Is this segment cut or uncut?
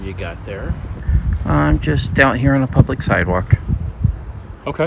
cut